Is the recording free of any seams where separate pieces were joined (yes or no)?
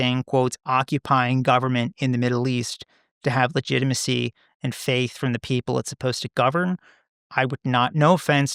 yes